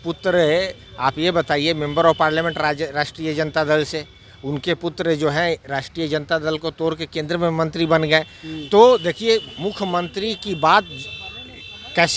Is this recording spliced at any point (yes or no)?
no